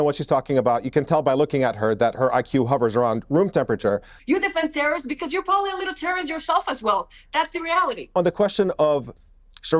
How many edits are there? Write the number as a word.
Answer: two